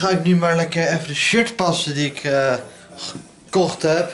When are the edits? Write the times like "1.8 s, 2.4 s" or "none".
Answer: none